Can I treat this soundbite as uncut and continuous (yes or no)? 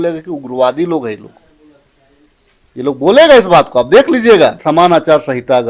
no